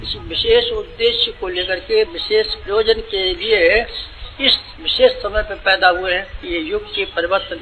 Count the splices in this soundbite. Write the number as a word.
zero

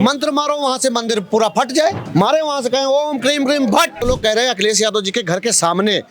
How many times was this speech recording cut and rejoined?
two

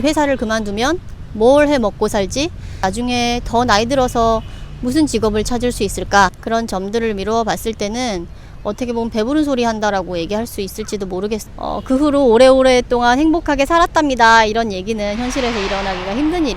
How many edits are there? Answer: three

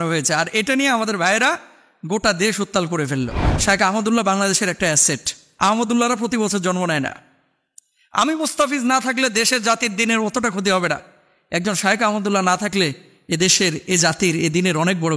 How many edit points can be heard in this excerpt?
one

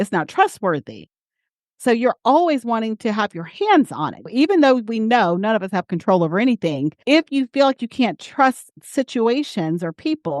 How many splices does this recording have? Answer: one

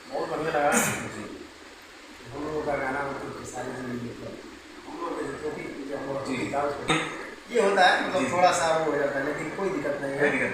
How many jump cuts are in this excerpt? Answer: one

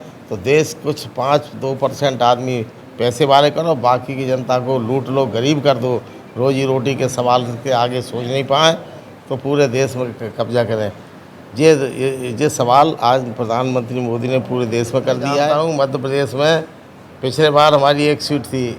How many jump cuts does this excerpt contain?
one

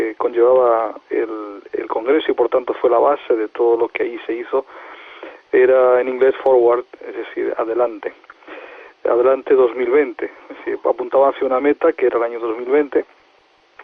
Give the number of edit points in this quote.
one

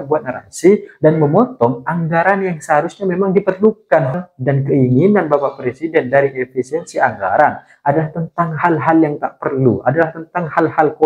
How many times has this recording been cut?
one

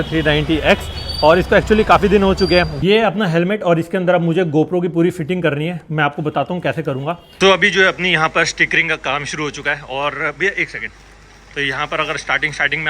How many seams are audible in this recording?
two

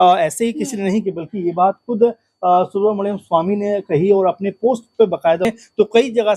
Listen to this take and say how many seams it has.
one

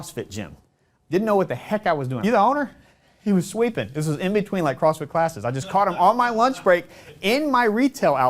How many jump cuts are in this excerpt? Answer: one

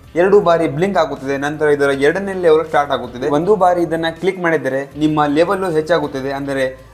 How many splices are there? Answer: one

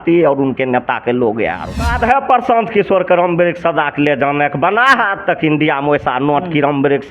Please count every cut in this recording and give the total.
one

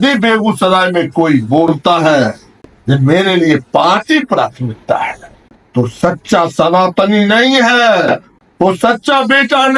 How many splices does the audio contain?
zero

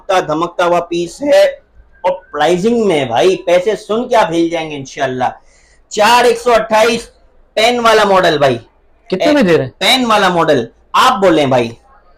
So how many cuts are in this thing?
zero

